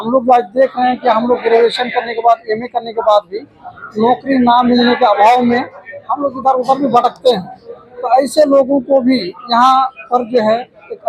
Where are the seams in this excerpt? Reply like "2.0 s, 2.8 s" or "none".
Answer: none